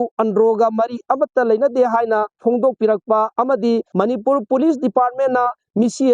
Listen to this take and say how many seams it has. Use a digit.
2